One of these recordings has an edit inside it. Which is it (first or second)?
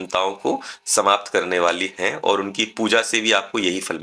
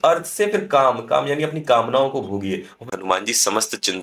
second